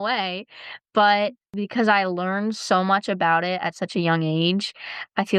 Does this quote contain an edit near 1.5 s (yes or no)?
yes